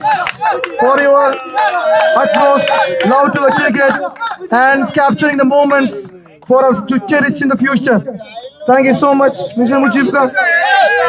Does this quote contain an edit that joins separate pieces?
no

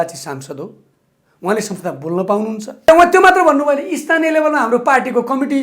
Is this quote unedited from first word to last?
no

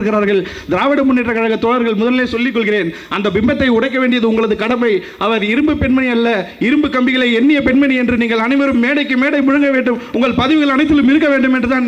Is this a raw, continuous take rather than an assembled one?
yes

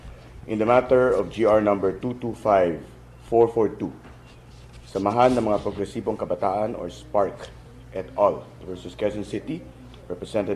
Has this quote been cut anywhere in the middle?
no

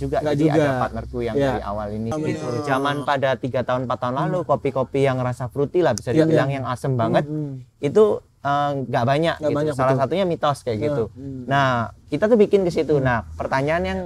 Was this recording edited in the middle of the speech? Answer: yes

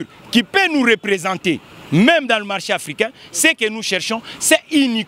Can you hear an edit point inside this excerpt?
no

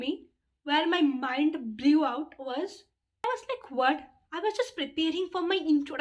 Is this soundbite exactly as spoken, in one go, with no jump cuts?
no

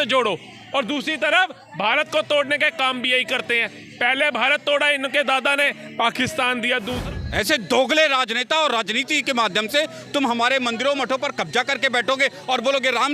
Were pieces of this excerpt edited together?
yes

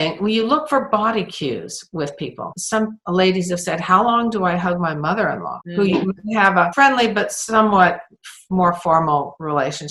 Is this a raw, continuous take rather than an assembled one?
yes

